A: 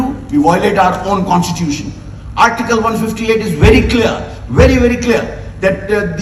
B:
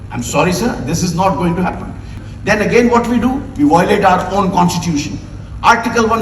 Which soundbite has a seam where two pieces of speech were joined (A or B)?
B